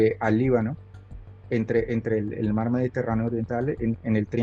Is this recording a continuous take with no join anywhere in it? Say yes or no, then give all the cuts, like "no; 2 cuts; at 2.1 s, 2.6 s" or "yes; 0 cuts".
yes; 0 cuts